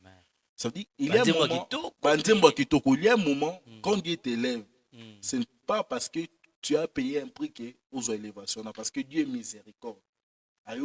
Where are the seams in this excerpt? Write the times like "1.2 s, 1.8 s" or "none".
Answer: none